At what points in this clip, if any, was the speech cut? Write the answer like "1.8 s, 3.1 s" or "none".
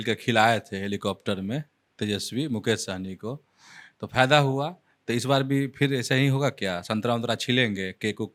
none